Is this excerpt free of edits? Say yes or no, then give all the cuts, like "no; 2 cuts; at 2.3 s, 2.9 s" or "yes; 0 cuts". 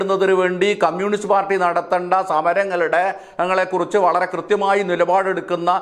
yes; 0 cuts